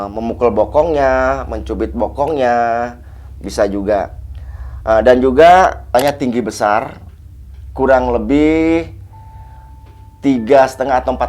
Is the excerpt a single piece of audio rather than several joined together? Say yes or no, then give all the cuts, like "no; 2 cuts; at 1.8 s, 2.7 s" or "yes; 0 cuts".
no; 1 cut; at 5.9 s